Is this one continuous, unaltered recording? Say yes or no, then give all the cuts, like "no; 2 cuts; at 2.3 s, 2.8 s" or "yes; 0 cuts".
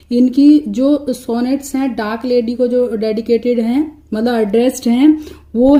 yes; 0 cuts